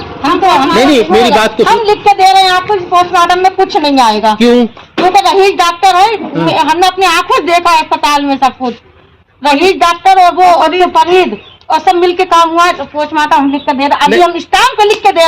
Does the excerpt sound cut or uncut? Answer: cut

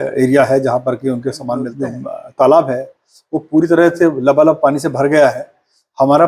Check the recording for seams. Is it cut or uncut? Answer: cut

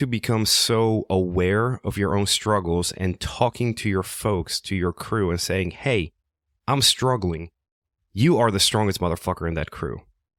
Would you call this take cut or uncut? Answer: uncut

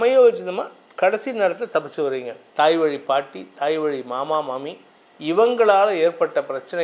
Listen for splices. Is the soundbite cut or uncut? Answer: cut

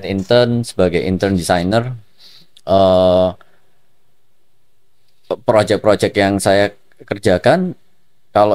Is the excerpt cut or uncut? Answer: uncut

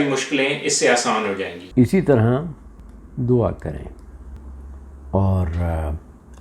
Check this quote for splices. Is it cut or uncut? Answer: uncut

